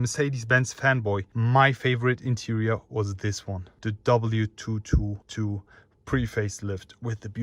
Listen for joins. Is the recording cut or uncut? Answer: cut